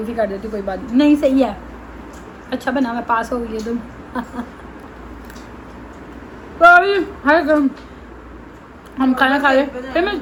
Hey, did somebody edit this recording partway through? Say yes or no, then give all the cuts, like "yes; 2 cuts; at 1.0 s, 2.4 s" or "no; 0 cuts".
no; 0 cuts